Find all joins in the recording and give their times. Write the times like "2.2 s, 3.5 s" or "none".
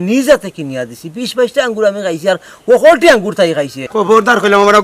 3.8 s